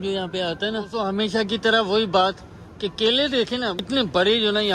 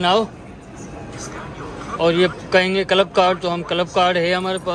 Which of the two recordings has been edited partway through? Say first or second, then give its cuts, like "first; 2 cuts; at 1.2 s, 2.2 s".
first; 1 cut; at 1.1 s